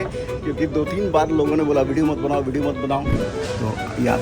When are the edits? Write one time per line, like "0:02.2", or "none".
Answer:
0:03.2